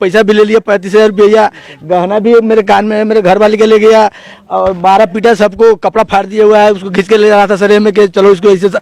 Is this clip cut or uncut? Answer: uncut